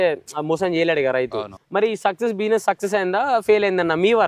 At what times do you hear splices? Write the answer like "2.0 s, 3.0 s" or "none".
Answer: 1.6 s